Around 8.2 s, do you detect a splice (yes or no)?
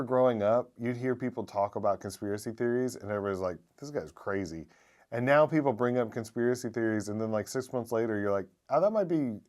no